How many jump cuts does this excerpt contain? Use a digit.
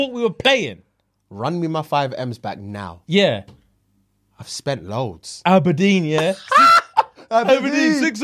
0